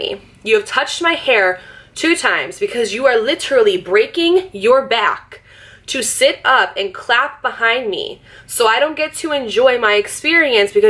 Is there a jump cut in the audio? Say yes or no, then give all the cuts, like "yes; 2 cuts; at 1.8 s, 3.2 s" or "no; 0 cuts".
no; 0 cuts